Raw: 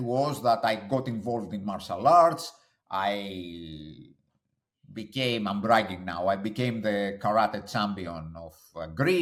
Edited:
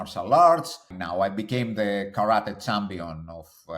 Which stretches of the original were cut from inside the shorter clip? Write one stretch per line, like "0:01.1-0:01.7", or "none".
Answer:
0:02.7-0:06.0